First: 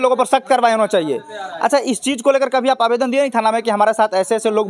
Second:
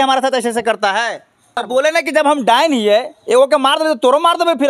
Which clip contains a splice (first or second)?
second